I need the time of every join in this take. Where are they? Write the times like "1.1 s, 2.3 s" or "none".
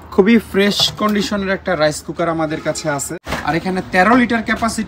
3.2 s